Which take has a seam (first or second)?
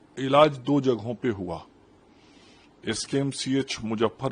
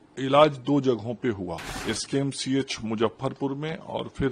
second